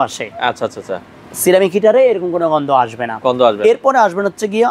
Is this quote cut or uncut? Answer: uncut